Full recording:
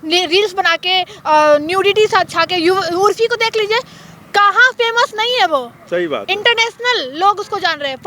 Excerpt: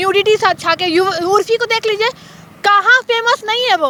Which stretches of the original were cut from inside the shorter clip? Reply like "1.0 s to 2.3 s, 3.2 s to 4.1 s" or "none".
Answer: none